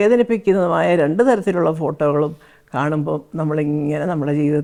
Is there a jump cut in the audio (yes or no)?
no